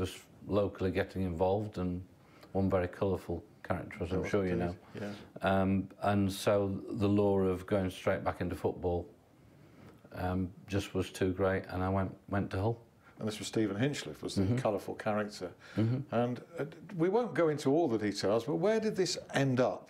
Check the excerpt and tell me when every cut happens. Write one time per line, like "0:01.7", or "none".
0:13.7